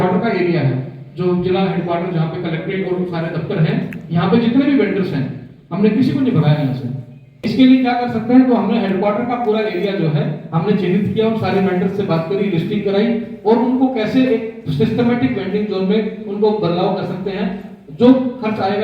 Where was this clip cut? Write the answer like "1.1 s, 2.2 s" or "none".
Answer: 7.5 s